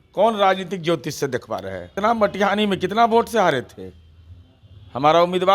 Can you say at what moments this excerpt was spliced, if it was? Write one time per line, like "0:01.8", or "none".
0:01.9